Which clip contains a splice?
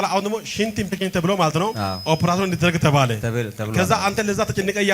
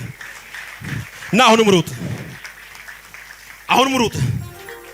first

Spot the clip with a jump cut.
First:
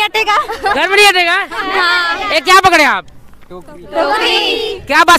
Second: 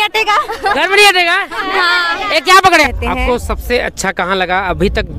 second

